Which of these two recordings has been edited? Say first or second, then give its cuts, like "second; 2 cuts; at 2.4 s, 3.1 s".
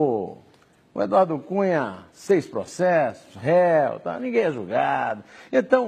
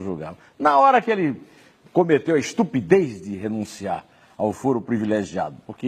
first; 1 cut; at 4.1 s